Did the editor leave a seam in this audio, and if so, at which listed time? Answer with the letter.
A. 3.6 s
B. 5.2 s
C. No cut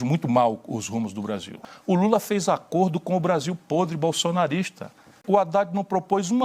B